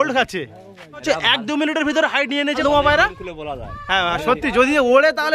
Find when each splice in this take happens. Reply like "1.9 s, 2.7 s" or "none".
1.0 s, 2.6 s